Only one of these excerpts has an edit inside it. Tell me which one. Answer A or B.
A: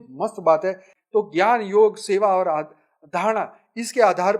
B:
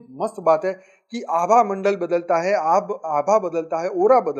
A